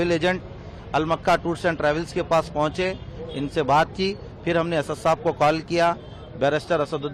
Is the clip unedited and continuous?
yes; 0 cuts

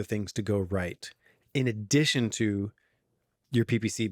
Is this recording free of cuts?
yes; 0 cuts

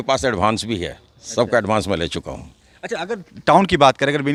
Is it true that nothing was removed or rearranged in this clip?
yes; 0 cuts

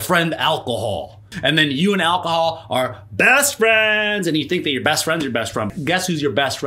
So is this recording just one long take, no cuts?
no; 2 cuts; at 1.2 s, 5.8 s

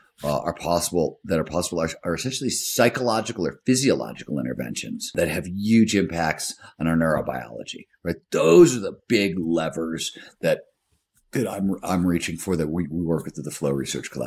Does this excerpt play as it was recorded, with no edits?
no; 1 cut; at 5.1 s

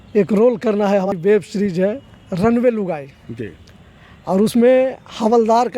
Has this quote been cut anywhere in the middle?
yes; 1 cut; at 1.1 s

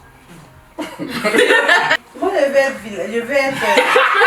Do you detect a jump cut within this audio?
yes; 1 cut; at 1.9 s

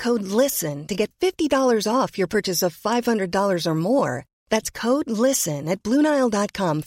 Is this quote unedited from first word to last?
yes; 0 cuts

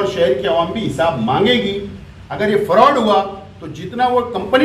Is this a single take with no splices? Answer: yes; 0 cuts

